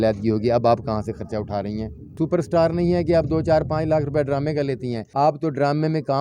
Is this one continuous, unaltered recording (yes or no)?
no